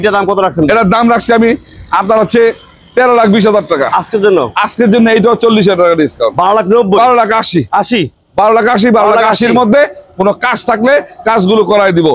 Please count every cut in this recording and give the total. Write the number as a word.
zero